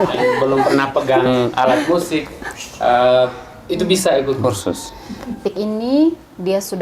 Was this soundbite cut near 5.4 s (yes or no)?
yes